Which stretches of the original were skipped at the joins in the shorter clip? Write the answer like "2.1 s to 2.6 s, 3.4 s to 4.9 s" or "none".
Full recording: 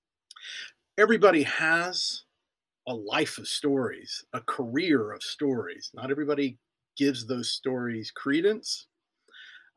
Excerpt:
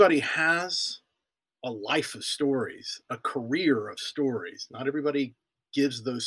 none